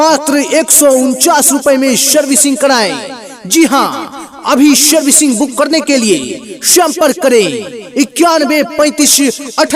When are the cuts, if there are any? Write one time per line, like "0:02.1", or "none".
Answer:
none